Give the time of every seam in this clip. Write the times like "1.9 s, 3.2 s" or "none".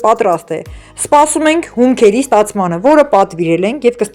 none